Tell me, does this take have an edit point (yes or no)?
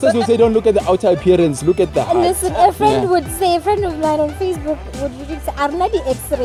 no